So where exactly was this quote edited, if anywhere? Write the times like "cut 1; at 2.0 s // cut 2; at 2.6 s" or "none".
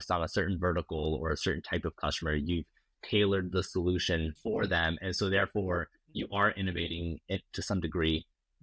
cut 1; at 4.3 s